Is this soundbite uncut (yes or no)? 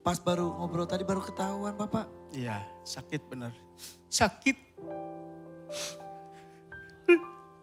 yes